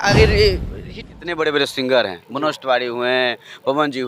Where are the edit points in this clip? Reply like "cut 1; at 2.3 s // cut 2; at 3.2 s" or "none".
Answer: cut 1; at 1.0 s